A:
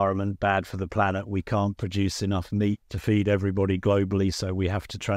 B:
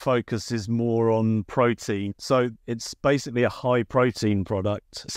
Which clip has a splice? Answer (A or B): A